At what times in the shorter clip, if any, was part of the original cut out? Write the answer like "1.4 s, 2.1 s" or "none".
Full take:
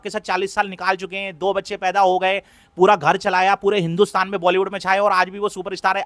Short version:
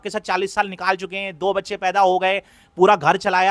none